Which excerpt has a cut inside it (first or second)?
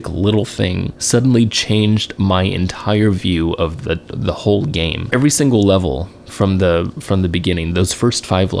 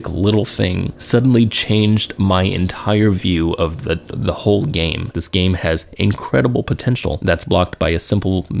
second